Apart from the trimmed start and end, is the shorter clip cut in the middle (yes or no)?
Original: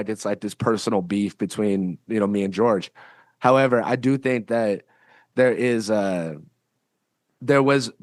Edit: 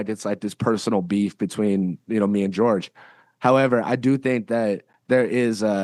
yes